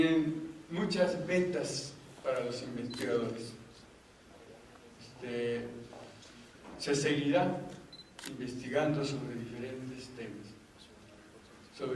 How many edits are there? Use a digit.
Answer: 1